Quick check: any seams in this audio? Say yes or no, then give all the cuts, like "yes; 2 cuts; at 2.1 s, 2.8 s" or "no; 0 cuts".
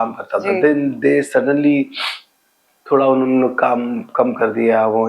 no; 0 cuts